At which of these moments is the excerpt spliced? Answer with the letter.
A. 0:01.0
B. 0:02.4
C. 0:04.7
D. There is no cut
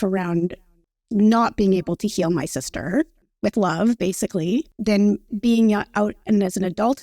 C